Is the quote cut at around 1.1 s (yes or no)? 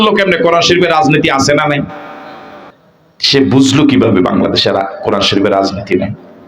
no